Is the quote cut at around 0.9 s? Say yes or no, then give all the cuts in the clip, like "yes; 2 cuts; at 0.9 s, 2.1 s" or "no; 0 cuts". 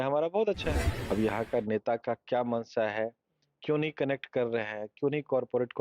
yes; 1 cut; at 0.9 s